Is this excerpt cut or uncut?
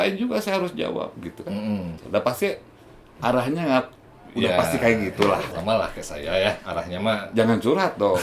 cut